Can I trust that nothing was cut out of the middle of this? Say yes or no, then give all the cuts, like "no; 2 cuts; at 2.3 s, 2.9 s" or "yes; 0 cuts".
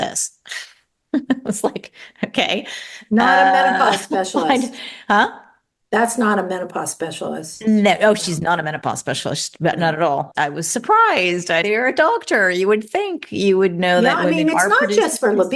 no; 2 cuts; at 10.3 s, 11.6 s